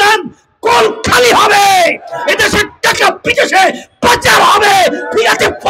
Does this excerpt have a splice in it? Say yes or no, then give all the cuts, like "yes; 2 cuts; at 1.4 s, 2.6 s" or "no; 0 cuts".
no; 0 cuts